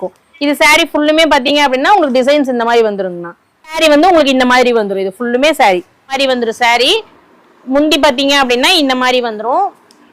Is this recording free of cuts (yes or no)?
no